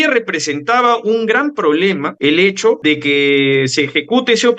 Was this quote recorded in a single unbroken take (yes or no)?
no